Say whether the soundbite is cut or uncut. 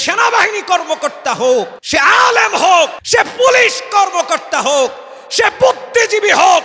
cut